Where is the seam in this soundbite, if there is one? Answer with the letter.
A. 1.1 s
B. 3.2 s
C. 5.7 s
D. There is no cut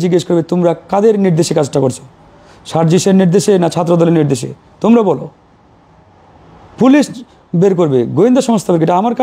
D